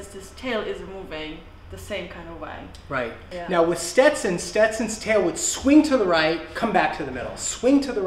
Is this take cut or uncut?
uncut